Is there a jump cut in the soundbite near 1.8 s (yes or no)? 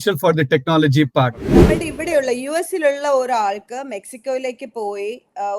yes